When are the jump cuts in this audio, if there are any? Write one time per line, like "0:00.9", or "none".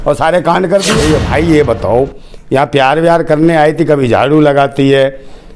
0:01.0